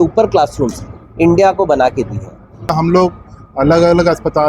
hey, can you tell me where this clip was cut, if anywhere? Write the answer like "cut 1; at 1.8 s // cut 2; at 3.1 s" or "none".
cut 1; at 2.7 s